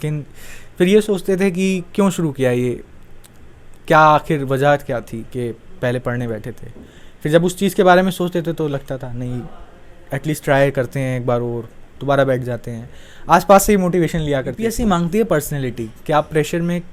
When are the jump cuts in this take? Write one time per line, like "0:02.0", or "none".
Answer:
0:14.6